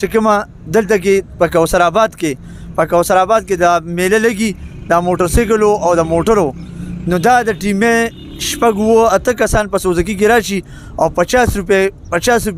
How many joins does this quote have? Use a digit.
0